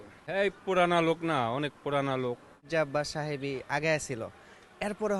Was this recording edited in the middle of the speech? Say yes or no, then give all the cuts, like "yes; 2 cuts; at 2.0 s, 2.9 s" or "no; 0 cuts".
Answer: yes; 1 cut; at 2.7 s